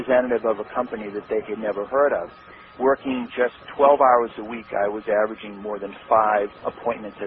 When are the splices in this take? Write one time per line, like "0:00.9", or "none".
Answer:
none